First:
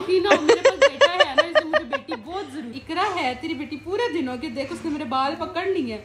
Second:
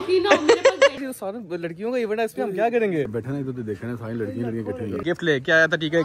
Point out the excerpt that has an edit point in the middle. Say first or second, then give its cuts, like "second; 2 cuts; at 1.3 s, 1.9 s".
second; 3 cuts; at 0.9 s, 3.1 s, 5.0 s